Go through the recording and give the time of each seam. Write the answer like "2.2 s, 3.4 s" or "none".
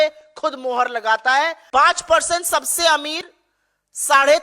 1.6 s